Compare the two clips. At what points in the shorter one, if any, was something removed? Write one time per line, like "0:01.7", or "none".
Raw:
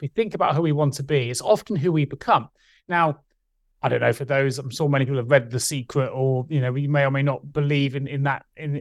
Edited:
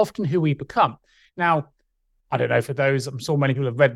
none

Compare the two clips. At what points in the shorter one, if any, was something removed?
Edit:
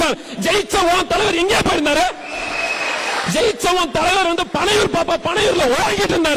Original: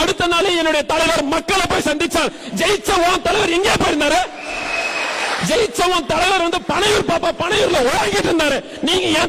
none

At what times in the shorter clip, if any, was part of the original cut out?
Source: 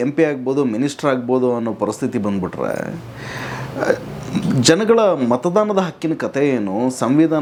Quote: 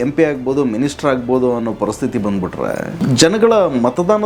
0:03.0

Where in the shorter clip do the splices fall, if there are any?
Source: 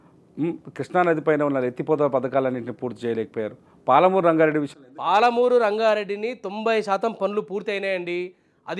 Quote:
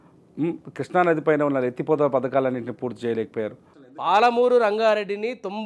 0:03.7

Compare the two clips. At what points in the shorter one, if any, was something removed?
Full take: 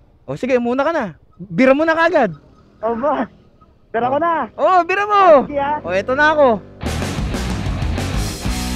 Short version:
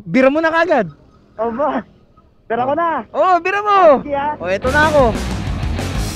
0:05.1

